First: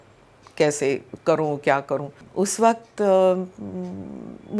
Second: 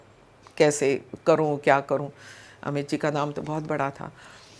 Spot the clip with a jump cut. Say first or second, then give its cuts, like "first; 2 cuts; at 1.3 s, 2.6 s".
first; 1 cut; at 2.2 s